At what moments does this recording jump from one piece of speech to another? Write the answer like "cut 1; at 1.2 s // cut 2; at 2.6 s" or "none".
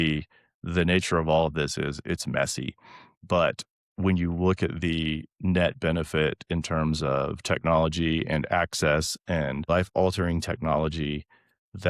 cut 1; at 9.7 s